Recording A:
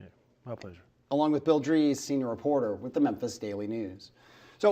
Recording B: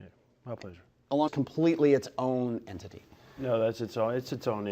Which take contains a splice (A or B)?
A